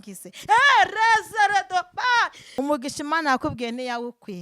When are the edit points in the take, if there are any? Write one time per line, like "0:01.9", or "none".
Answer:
0:02.4